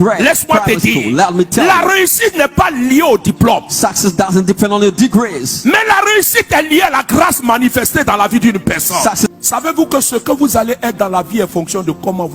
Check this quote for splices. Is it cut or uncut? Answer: cut